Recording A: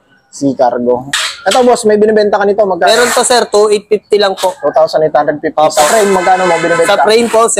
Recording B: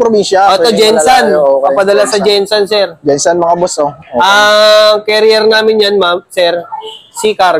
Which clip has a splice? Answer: A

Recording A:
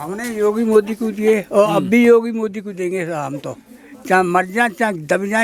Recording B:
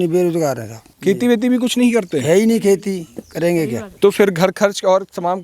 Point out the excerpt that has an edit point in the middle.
B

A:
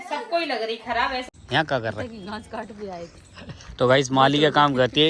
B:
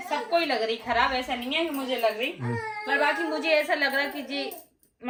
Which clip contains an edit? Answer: A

